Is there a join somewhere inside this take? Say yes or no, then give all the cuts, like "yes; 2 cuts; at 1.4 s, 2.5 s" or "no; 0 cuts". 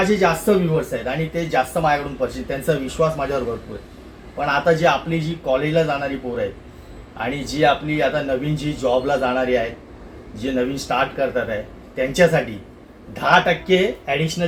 no; 0 cuts